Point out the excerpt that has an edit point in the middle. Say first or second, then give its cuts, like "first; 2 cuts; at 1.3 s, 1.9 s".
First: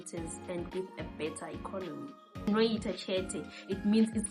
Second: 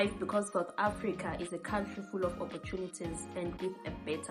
first; 1 cut; at 2.5 s